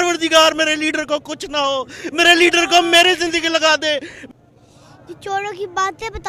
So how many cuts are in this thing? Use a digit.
1